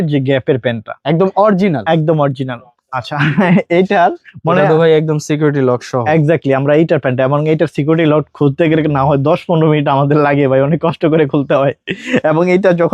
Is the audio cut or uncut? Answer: uncut